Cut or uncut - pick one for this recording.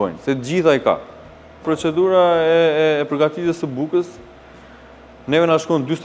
uncut